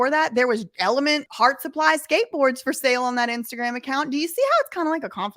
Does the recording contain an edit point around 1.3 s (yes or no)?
yes